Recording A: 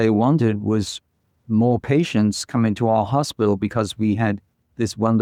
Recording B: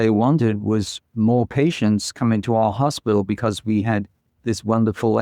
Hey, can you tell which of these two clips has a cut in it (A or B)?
B